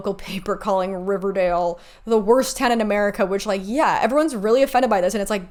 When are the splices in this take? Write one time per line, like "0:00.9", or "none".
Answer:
none